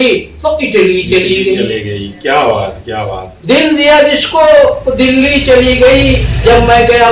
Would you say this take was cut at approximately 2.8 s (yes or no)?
no